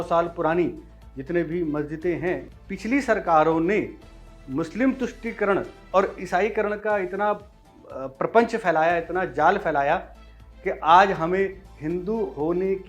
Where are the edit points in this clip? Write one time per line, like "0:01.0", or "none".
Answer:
0:02.5